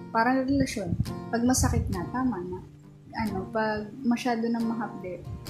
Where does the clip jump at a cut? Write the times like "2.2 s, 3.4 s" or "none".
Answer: 3.1 s